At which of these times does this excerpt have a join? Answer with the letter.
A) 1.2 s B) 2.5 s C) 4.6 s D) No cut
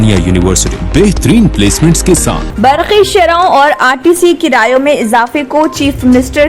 B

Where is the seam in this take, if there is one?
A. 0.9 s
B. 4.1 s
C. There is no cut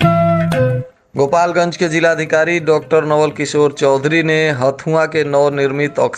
A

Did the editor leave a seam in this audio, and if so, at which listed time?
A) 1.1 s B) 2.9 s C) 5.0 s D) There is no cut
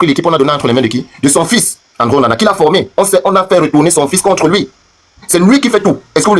D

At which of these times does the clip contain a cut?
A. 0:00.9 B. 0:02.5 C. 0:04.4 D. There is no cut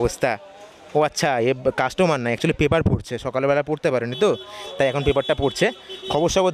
D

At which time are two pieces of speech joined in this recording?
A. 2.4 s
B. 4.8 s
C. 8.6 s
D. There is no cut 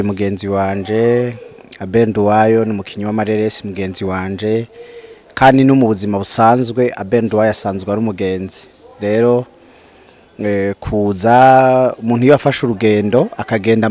D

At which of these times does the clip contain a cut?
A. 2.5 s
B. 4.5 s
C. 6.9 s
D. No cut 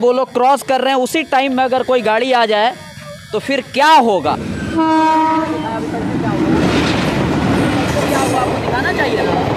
B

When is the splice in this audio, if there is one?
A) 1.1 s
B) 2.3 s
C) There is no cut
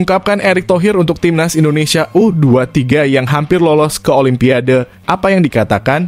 C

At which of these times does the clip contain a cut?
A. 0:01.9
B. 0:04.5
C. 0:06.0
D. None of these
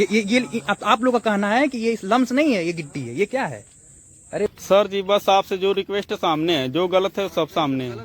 B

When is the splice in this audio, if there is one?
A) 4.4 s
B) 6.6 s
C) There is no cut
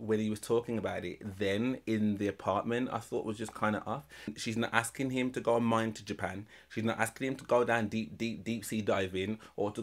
A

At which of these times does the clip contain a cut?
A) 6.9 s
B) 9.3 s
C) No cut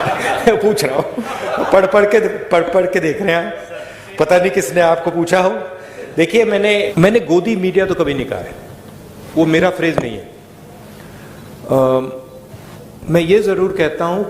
A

